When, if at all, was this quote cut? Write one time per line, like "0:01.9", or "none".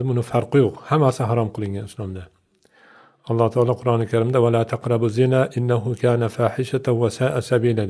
0:04.2